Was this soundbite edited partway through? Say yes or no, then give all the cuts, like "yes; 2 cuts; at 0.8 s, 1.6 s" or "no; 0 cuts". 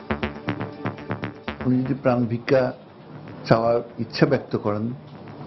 yes; 1 cut; at 1.4 s